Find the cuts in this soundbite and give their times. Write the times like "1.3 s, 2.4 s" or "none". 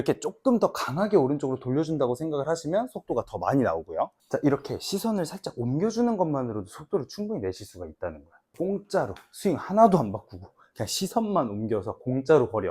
8.5 s